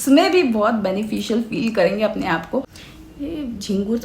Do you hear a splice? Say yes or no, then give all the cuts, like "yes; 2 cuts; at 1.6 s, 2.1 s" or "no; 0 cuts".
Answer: yes; 1 cut; at 2.8 s